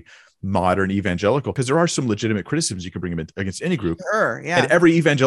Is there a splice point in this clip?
yes; 1 cut; at 1.5 s

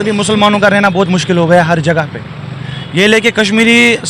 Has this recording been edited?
no; 0 cuts

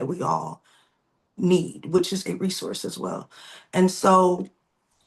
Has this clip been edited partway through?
no; 0 cuts

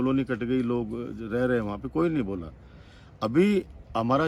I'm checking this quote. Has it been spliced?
no; 0 cuts

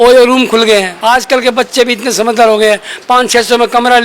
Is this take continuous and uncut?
no; 1 cut; at 0.9 s

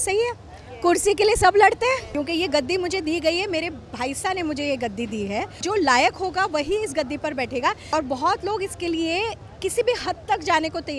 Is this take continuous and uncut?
no; 3 cuts; at 2.1 s, 5.6 s, 7.9 s

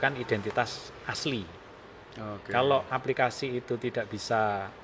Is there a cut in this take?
no; 0 cuts

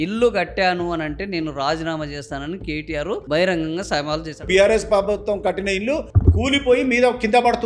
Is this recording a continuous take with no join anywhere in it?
no; 1 cut; at 4.5 s

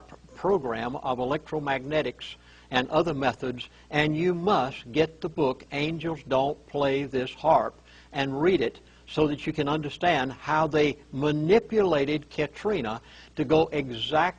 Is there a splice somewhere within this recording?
no; 0 cuts

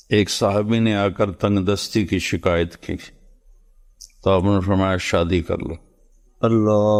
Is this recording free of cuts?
yes; 0 cuts

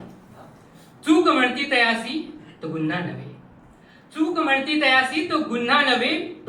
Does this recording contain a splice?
no; 0 cuts

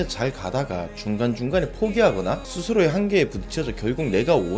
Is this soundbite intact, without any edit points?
yes; 0 cuts

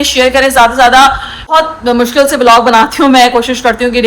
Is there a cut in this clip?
yes; 1 cut; at 1.5 s

